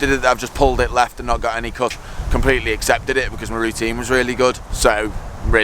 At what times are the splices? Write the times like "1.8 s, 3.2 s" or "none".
2.1 s, 4.7 s